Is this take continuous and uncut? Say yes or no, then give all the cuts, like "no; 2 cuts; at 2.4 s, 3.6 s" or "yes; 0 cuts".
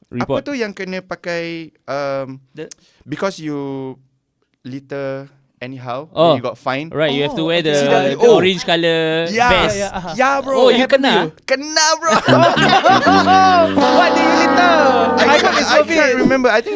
yes; 0 cuts